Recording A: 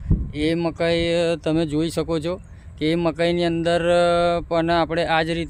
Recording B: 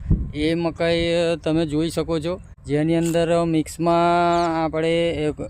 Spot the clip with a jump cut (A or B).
B